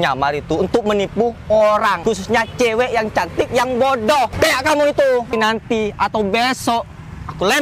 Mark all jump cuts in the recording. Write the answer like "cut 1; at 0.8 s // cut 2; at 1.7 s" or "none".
cut 1; at 2.0 s // cut 2; at 4.3 s // cut 3; at 5.3 s